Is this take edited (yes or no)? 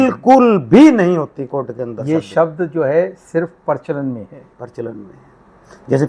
no